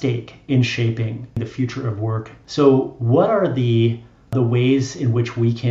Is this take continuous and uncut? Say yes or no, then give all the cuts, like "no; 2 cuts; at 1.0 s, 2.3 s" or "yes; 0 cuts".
no; 3 cuts; at 1.4 s, 2.4 s, 4.3 s